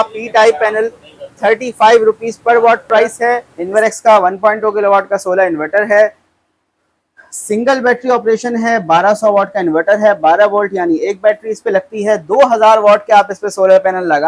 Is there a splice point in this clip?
yes; 1 cut; at 3.5 s

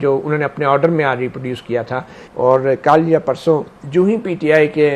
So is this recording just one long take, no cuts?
no; 1 cut; at 2.2 s

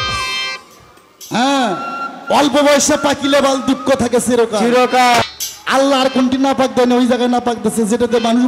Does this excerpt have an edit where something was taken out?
yes; 1 cut; at 5.2 s

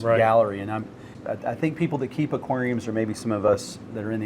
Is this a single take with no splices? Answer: yes; 0 cuts

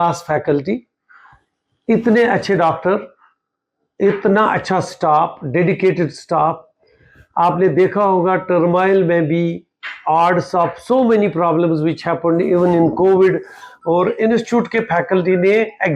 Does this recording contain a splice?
no; 0 cuts

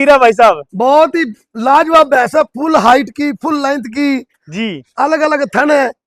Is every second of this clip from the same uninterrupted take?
yes; 0 cuts

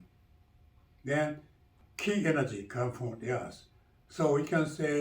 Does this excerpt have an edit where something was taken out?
yes; 1 cut; at 1.8 s

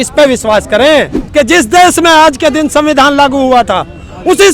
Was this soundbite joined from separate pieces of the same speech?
yes; 1 cut; at 1.2 s

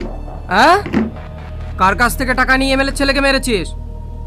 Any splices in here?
no; 0 cuts

